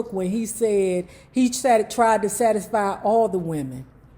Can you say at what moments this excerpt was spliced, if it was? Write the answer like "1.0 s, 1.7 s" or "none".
none